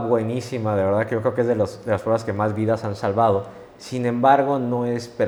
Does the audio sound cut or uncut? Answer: uncut